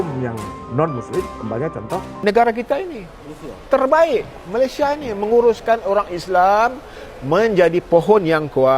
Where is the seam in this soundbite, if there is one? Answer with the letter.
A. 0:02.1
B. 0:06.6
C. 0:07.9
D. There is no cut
A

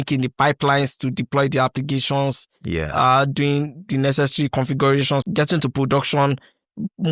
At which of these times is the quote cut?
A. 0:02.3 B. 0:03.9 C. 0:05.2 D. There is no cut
C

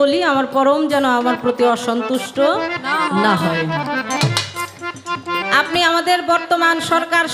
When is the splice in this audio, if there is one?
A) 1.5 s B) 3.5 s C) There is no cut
C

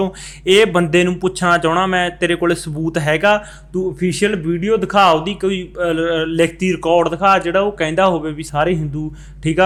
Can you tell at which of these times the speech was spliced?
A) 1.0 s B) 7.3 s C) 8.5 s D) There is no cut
D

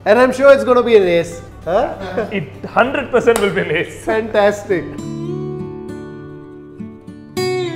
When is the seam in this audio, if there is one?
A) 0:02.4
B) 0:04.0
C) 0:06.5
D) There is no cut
D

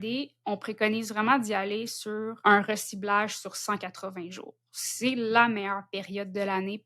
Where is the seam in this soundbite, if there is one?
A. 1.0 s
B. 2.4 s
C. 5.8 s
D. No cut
B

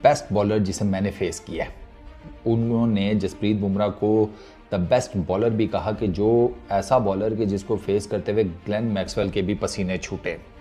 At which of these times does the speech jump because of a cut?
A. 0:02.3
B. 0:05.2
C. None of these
C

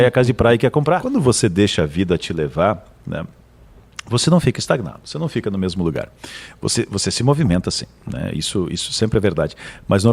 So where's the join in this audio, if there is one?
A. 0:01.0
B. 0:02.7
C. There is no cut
A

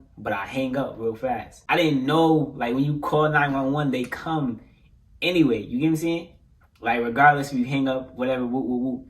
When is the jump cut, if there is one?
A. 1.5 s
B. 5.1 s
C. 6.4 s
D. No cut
A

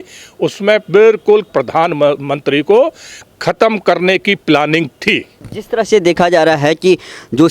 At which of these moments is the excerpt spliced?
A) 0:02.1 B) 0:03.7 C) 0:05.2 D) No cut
D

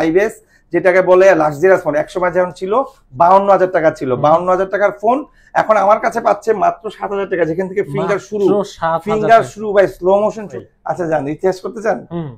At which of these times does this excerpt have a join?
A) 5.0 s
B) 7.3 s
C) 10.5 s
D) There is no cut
C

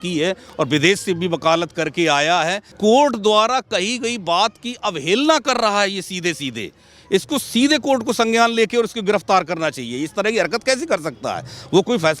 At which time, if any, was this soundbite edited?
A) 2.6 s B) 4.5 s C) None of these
A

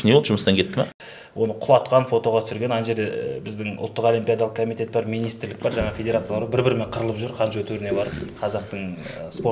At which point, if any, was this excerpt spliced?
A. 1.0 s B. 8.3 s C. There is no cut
A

